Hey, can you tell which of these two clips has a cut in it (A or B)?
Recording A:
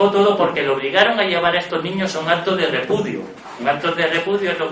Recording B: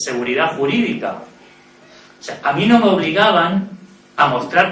B